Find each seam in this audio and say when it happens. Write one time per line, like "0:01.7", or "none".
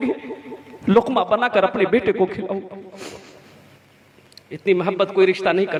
none